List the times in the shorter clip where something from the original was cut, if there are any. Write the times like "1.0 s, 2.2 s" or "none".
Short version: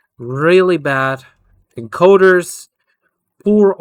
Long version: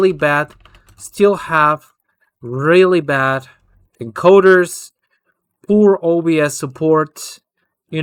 none

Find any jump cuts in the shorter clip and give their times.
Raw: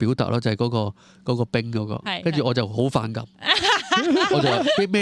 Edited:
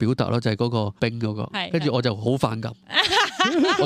1.0 s

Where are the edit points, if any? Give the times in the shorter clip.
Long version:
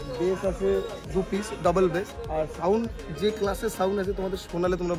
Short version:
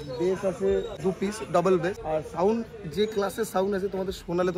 0.9 s, 2.0 s

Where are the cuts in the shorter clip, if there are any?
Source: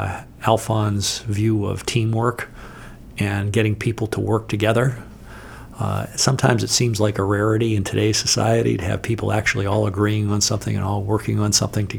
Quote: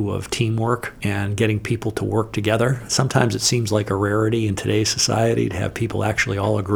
0.9 s, 2.8 s

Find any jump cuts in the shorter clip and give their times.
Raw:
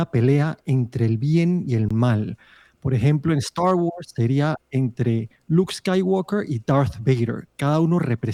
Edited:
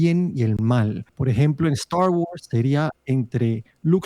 1.1 s

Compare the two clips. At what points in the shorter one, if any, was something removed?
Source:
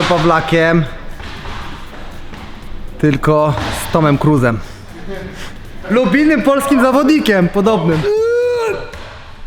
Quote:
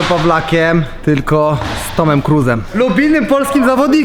0.9 s, 2.7 s

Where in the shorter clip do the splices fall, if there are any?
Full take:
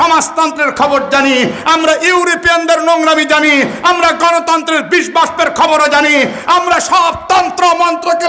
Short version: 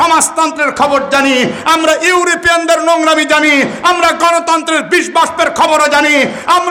none

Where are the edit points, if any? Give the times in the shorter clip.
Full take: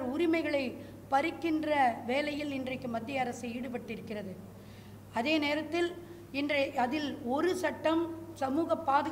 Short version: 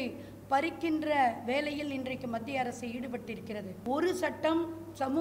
3.8 s

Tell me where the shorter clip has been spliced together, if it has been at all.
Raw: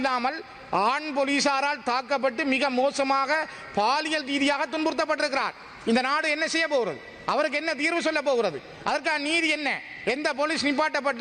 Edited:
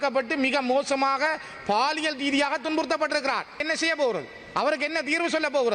3.6 s

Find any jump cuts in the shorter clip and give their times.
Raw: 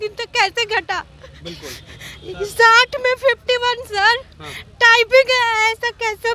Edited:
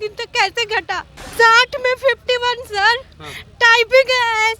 1.3 s

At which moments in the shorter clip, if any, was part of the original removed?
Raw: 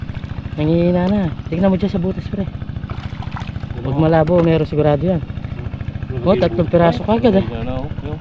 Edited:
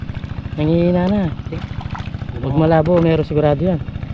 1.4 s

